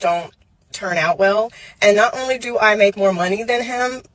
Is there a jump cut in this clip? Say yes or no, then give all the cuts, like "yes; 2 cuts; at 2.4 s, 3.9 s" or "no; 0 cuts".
yes; 1 cut; at 3.2 s